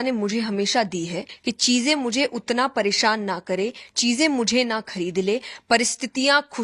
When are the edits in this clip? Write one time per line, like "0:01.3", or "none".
0:01.3